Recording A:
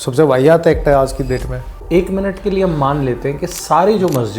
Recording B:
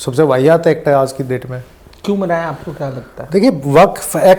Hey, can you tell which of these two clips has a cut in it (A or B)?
A